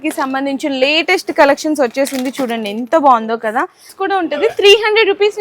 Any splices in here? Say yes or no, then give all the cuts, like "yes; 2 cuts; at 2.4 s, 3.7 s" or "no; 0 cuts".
yes; 1 cut; at 3.9 s